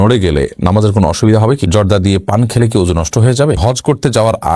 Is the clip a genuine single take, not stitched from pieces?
no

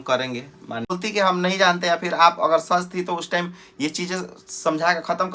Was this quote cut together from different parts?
yes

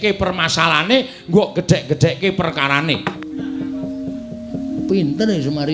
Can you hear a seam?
yes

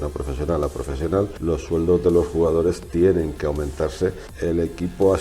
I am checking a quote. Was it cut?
yes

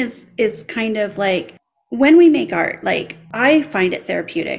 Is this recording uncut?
no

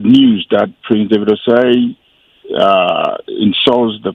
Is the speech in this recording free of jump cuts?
yes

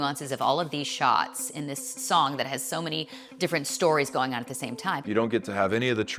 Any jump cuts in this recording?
yes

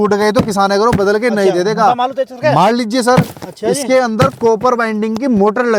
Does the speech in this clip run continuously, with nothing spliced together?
yes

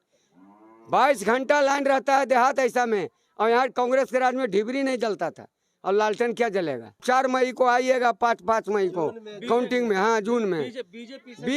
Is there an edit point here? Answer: yes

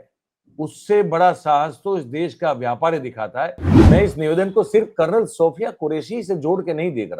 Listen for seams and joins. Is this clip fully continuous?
no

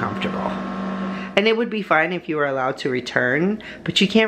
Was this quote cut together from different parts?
yes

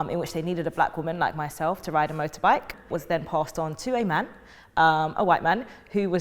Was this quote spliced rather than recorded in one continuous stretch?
yes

